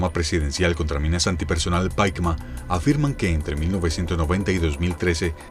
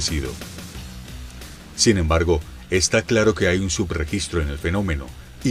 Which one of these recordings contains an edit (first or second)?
first